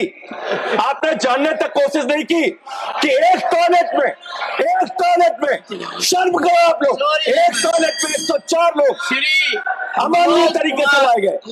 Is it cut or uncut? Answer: uncut